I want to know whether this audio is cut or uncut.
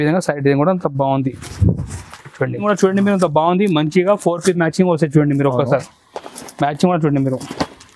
cut